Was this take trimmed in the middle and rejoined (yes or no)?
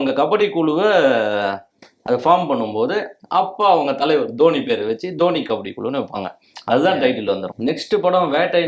yes